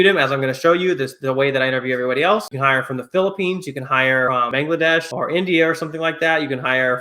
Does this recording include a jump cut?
yes; 1 cut; at 2.5 s

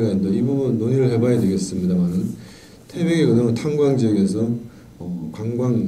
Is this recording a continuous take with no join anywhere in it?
yes; 0 cuts

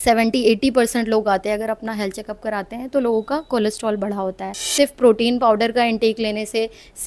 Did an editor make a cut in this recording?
yes; 1 cut; at 4.6 s

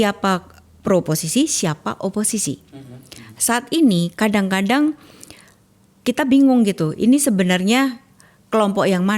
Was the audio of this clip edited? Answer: no; 0 cuts

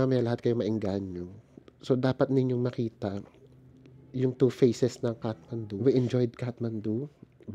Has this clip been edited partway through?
yes; 1 cut; at 5.8 s

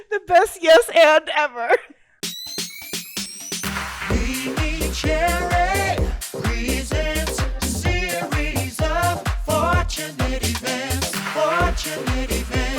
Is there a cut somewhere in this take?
yes; 1 cut; at 2.4 s

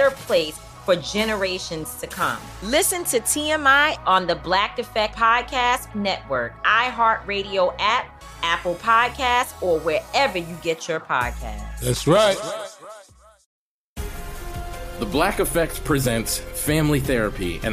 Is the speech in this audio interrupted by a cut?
yes; 1 cut; at 13.5 s

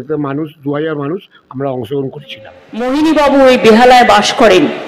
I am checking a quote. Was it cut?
yes; 1 cut; at 2.9 s

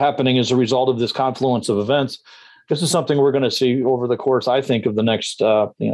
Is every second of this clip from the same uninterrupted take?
yes; 0 cuts

